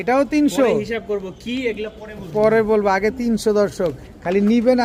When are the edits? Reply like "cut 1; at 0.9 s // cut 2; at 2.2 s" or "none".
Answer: none